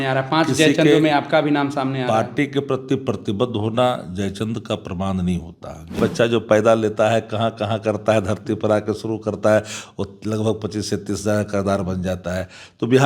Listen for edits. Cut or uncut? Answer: cut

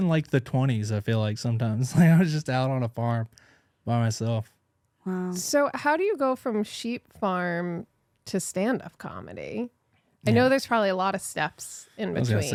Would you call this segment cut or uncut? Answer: uncut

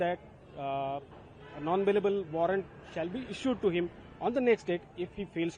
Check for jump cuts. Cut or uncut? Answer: uncut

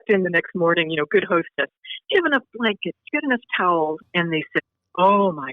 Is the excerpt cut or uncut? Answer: cut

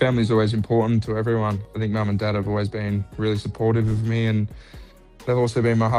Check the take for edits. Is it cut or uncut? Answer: uncut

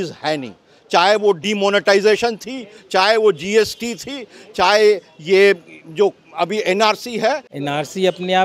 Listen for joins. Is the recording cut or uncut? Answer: cut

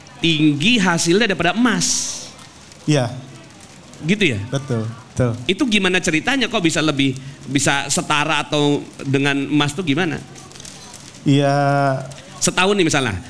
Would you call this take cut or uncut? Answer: cut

